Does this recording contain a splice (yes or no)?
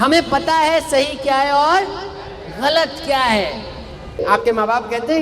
yes